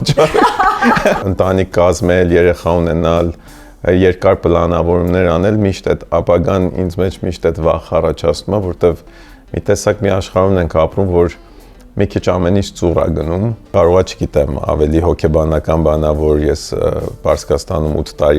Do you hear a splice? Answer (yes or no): yes